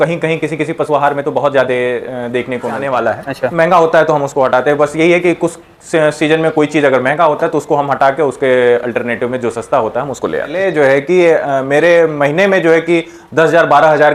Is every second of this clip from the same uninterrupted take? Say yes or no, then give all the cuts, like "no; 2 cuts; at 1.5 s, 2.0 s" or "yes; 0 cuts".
no; 2 cuts; at 2.8 s, 10.6 s